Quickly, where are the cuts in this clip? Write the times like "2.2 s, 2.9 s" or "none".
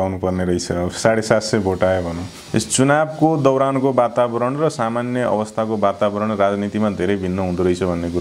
2.4 s